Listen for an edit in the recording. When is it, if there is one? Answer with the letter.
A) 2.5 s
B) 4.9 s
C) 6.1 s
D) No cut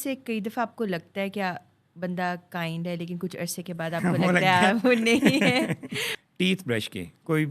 C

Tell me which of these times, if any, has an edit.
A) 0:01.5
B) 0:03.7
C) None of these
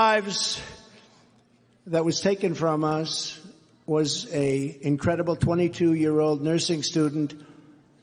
C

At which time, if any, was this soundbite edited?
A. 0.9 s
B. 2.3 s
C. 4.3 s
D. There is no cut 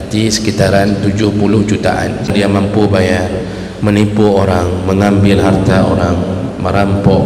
B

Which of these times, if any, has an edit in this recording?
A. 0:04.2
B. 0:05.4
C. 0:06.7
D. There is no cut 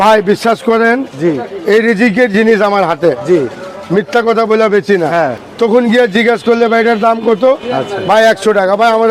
B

